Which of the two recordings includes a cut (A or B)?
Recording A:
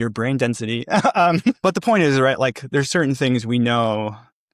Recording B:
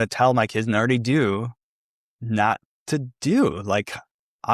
A